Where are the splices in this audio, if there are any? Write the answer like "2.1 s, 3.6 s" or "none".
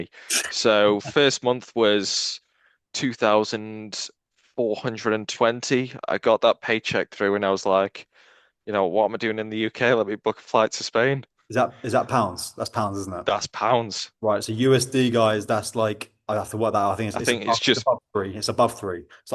none